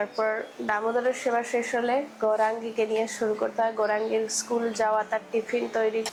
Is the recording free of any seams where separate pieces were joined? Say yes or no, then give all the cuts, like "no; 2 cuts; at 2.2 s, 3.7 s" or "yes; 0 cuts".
yes; 0 cuts